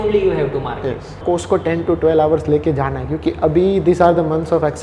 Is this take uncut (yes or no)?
no